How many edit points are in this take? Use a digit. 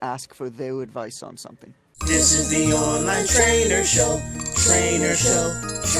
1